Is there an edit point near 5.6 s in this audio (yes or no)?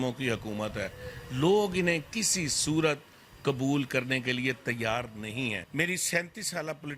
yes